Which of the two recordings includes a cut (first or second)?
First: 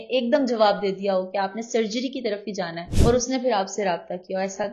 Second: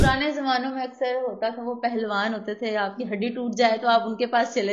first